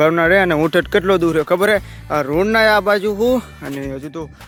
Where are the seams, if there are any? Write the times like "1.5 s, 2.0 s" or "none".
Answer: none